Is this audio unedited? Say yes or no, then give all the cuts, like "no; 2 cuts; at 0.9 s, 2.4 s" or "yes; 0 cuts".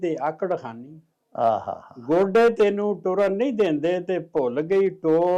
yes; 0 cuts